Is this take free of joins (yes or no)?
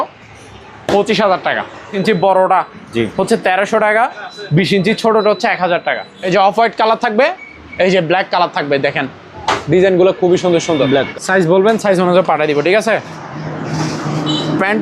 no